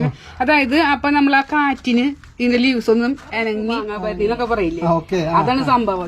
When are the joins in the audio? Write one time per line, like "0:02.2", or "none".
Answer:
0:03.9

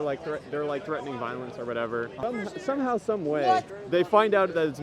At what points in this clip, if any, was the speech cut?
0:02.2
0:03.8

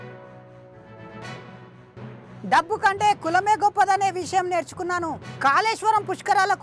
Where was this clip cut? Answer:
0:02.3

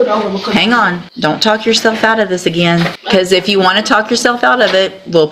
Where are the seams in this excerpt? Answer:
0:01.0
0:03.0

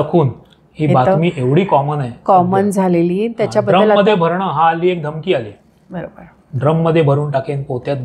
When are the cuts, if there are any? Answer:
none

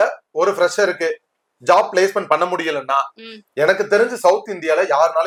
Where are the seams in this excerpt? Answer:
none

